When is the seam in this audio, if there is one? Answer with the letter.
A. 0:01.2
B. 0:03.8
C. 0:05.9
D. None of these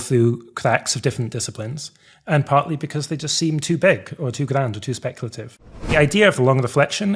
C